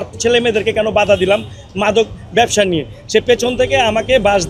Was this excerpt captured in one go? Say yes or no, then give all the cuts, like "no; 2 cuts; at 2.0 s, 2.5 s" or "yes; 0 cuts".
yes; 0 cuts